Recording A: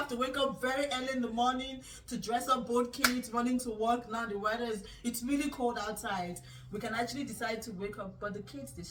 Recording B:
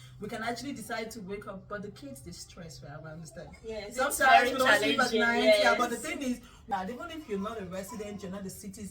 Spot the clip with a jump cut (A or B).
B